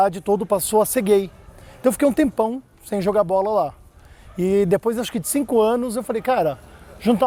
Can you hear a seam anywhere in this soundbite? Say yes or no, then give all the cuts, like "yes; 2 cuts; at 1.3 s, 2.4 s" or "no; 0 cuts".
no; 0 cuts